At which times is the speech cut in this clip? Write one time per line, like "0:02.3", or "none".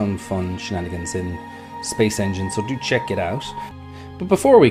none